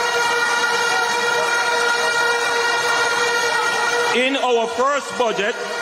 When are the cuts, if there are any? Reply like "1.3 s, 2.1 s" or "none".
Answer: none